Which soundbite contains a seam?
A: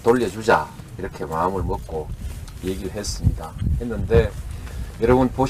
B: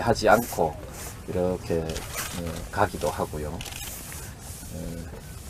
B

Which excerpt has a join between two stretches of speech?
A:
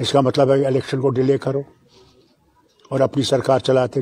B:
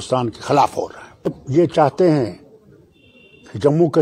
B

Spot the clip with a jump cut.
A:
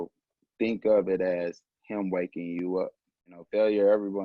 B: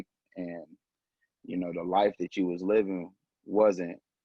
A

